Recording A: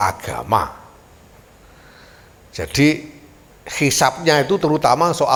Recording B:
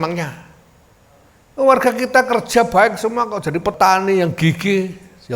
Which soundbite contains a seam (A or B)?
B